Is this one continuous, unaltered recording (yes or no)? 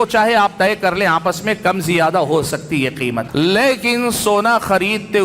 no